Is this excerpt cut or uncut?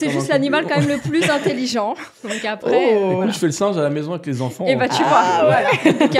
uncut